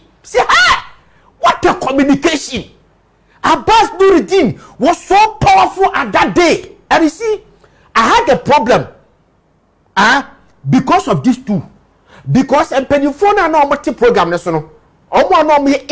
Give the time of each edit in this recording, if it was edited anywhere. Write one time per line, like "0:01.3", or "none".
none